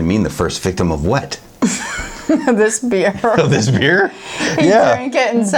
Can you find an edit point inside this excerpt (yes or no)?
no